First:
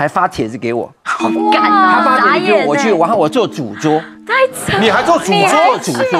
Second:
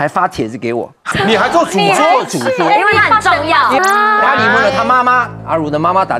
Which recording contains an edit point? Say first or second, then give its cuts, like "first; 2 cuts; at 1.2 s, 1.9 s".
second; 2 cuts; at 1.1 s, 3.8 s